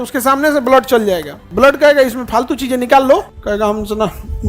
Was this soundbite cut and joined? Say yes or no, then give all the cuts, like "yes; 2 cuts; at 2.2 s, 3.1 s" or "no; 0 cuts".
yes; 2 cuts; at 1.4 s, 3.3 s